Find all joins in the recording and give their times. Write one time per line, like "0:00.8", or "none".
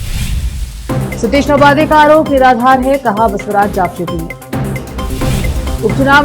0:00.9